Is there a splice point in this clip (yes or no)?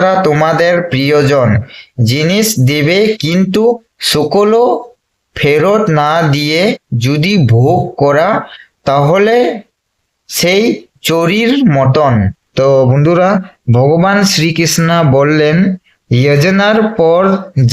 yes